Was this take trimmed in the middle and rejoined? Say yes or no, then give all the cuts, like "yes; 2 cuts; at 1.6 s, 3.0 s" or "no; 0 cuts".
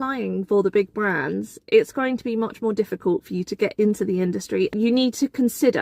yes; 1 cut; at 4.7 s